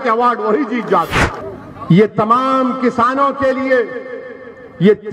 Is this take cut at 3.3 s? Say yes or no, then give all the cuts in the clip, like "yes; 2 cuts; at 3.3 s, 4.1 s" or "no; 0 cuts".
no; 1 cut; at 1.4 s